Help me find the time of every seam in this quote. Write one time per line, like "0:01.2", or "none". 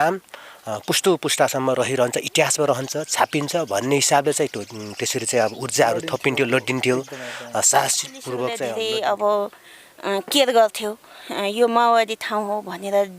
0:08.6